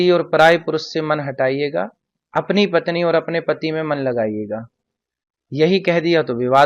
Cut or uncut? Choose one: uncut